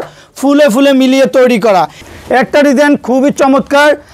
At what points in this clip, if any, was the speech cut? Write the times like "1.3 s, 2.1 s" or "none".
2.0 s